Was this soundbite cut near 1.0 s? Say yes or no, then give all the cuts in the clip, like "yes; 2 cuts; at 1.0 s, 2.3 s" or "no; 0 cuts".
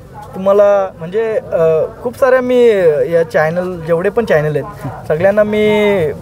yes; 1 cut; at 1.0 s